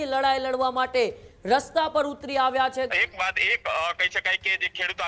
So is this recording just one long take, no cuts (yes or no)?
no